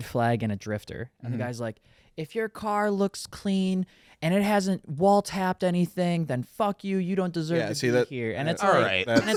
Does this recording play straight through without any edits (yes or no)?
yes